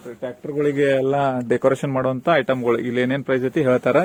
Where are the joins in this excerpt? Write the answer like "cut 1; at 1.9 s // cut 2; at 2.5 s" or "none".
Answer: none